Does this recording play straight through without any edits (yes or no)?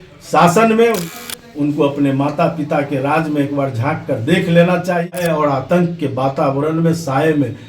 no